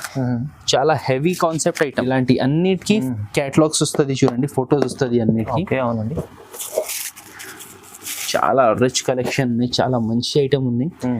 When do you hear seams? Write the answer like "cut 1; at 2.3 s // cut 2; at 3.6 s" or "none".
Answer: cut 1; at 2.0 s